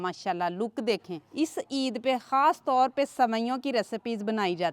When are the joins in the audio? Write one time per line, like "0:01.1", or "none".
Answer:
0:01.2

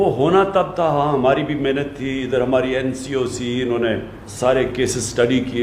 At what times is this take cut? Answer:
0:04.2

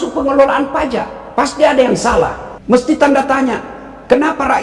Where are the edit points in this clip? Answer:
0:01.2
0:02.5

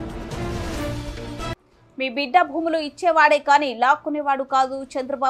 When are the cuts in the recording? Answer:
0:01.6

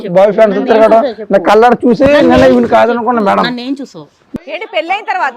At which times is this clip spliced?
0:04.3

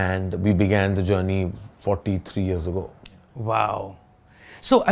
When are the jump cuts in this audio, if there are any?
none

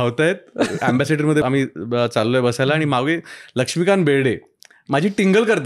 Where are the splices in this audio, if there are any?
0:01.4

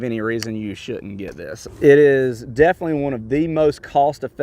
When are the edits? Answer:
0:01.6

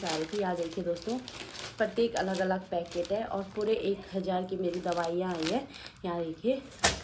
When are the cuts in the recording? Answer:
none

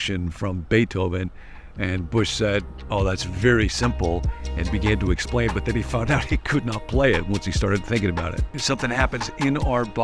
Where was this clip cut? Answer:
0:08.6

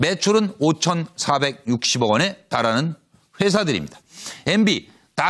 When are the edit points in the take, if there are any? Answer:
0:01.9

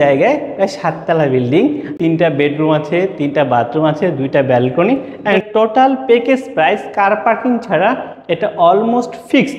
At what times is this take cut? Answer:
0:01.9
0:05.4

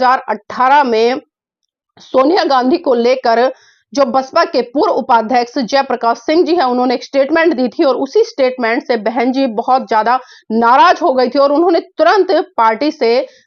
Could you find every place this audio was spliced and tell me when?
none

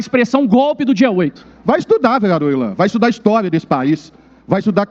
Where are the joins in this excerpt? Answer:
0:01.5

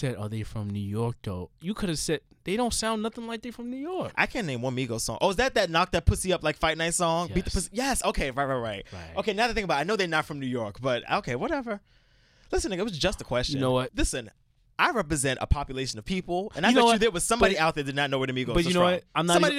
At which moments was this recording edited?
0:13.9

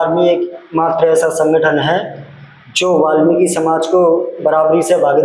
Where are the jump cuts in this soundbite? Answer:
none

